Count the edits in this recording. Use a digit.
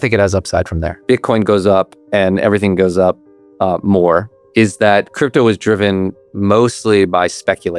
2